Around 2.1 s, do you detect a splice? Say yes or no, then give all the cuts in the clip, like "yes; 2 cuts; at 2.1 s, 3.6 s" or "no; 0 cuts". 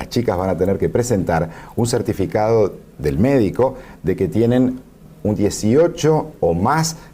yes; 1 cut; at 2.1 s